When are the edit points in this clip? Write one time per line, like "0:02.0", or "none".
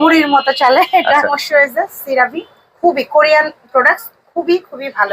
0:01.4